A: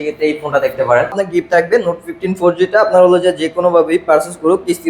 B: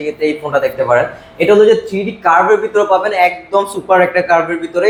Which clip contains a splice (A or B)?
A